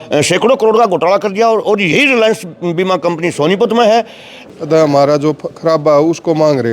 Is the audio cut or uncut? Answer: cut